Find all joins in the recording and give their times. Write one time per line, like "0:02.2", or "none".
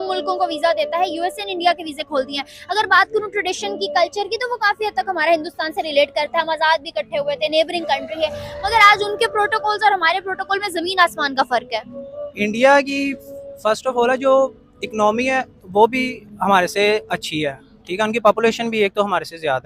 none